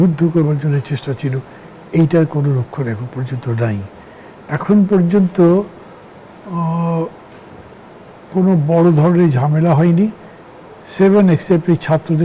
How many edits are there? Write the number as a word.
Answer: zero